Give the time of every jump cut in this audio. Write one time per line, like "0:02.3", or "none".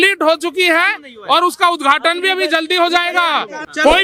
none

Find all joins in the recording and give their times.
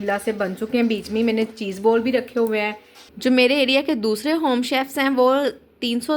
0:03.0

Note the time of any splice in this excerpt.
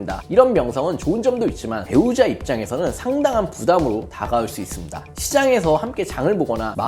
0:01.8

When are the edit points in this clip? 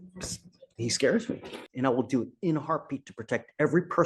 0:01.6

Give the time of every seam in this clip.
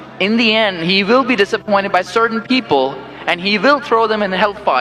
none

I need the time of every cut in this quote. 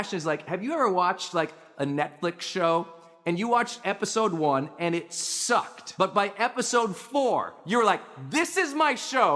0:05.8

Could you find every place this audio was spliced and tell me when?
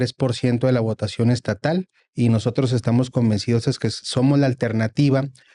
0:02.0

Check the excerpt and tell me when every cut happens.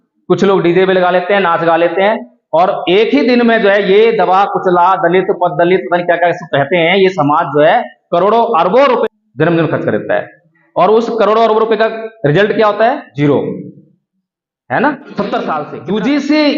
0:09.0
0:13.1
0:15.7

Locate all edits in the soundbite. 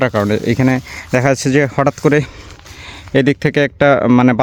none

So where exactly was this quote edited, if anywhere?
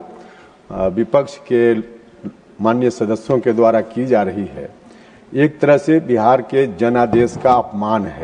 none

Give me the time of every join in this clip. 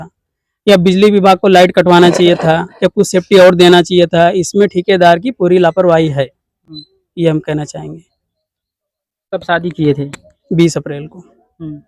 none

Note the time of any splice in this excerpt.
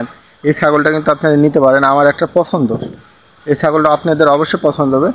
none

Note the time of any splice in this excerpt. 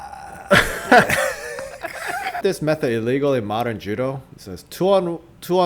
0:02.4

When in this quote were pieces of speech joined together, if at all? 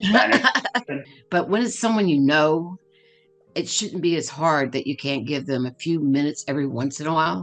0:01.0

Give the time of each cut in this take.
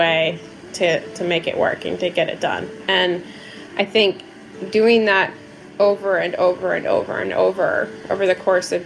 none

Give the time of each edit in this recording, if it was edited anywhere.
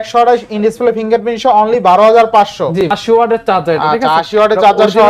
0:02.8

